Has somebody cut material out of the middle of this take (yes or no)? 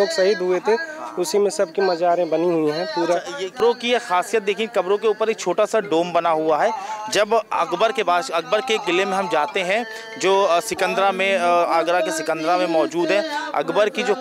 yes